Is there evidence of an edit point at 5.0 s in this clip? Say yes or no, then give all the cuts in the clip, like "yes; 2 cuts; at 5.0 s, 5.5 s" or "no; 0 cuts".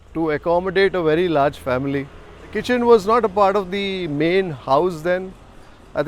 no; 1 cut; at 2.6 s